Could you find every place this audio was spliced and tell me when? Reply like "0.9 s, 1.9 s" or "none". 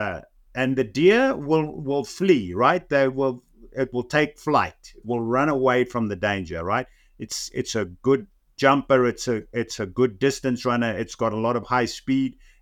none